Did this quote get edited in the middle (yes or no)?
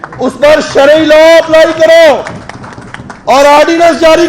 no